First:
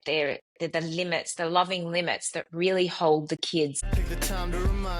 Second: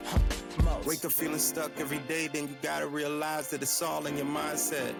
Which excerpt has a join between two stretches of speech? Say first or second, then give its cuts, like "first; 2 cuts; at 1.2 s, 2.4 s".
first; 1 cut; at 3.8 s